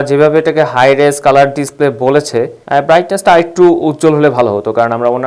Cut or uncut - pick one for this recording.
uncut